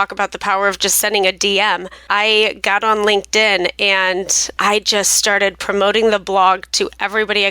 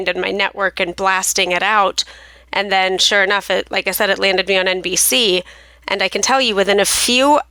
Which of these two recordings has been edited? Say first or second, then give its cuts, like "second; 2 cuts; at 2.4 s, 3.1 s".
first; 2 cuts; at 1.9 s, 4.6 s